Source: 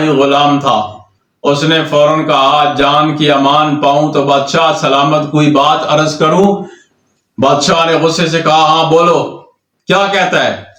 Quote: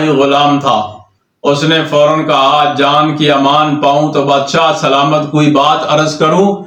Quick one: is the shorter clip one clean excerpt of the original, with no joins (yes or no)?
yes